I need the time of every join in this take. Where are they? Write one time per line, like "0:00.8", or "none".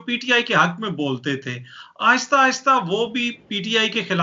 none